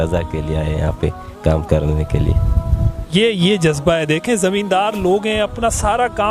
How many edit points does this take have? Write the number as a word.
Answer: zero